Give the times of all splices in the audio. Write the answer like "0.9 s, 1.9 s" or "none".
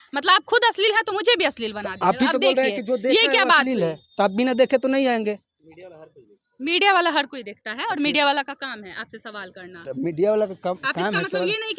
none